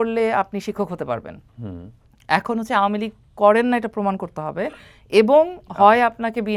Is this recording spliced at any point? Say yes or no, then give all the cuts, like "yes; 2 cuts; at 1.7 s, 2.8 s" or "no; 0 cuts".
no; 0 cuts